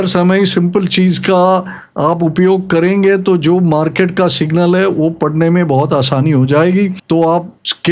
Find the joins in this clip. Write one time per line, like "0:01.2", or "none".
none